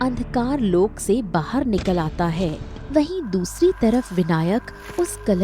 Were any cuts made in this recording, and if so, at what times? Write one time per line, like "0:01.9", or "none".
0:02.7

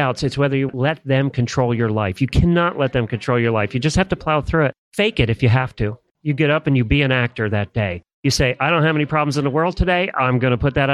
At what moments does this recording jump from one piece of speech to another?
0:04.8
0:06.1

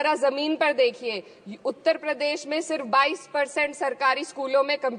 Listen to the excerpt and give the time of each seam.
none

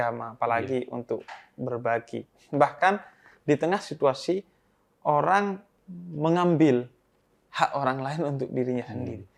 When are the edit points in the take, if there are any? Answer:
none

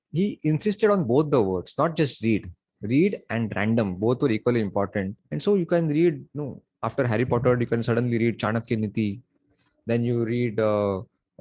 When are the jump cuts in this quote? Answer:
0:05.2

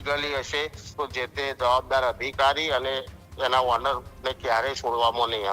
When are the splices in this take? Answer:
none

